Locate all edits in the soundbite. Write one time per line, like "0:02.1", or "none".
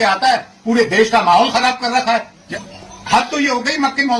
0:02.4